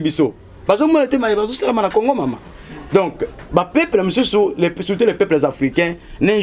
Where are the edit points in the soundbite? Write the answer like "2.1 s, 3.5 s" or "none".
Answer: none